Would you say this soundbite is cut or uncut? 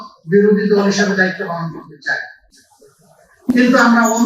uncut